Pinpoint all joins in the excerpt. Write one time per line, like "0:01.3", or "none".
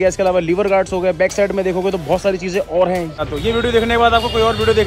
0:03.2